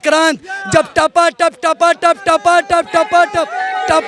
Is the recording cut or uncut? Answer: uncut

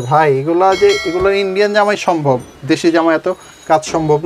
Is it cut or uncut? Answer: uncut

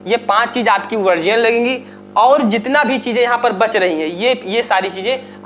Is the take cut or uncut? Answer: uncut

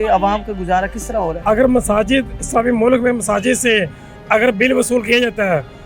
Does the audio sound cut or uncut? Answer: cut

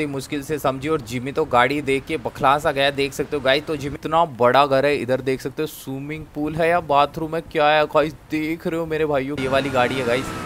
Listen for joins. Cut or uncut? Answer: cut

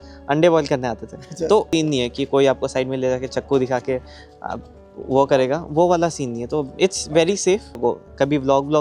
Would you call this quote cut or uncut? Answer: cut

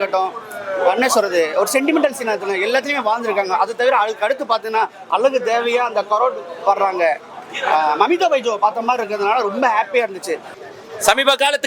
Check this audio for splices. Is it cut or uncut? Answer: cut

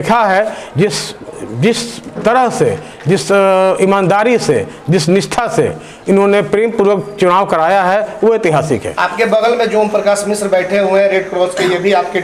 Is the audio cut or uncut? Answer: uncut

